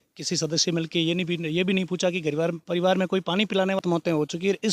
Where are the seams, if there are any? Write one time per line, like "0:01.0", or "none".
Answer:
0:03.8